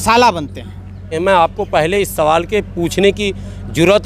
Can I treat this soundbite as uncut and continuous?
no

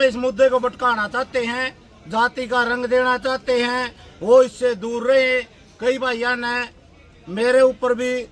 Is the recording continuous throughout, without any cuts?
yes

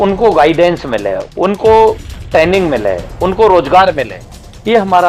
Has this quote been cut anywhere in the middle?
no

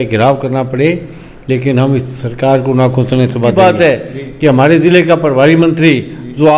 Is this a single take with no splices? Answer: no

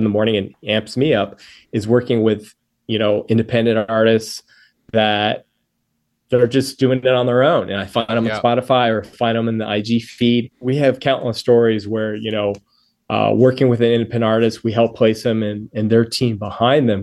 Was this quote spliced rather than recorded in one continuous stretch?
yes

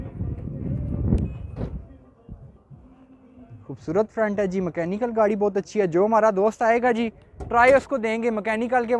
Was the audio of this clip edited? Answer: no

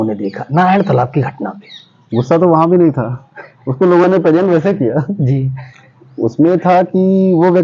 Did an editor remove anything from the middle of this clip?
no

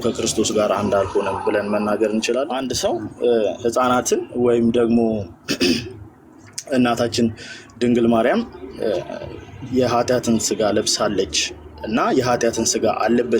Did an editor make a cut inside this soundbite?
yes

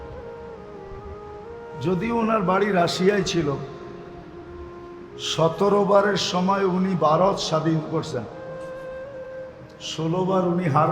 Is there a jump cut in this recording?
yes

